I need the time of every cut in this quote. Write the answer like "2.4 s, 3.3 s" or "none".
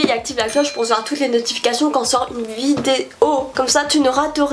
3.5 s